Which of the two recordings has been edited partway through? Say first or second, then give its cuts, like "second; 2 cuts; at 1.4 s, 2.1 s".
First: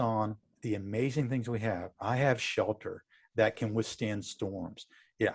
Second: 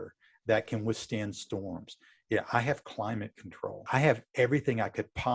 second; 1 cut; at 3.9 s